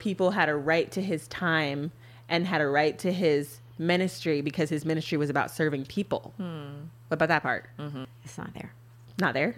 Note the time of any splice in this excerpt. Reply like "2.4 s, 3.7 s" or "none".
8.2 s